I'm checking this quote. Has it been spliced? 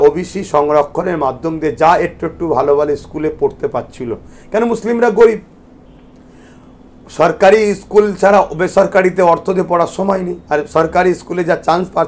no; 0 cuts

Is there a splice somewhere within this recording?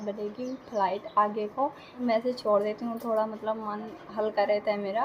yes; 1 cut; at 2.0 s

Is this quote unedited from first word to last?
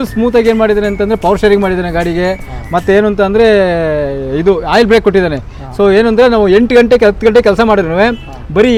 yes; 0 cuts

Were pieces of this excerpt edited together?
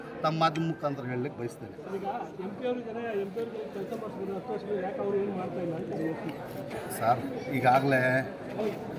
no; 0 cuts

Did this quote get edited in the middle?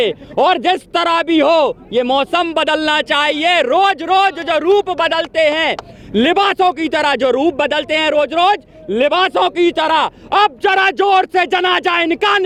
no; 0 cuts

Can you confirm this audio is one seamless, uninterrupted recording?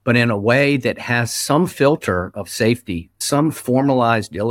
no; 1 cut; at 3.2 s

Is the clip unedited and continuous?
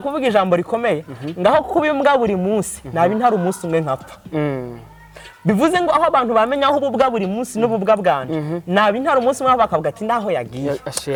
yes; 0 cuts

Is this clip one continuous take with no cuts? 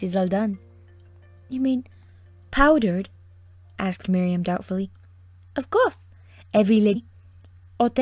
yes; 0 cuts

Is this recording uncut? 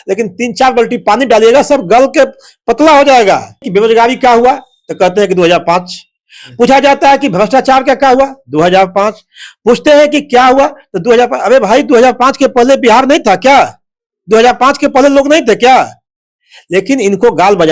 no; 1 cut; at 3.6 s

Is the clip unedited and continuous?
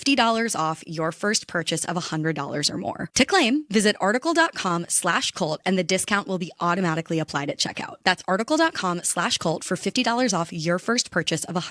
yes; 0 cuts

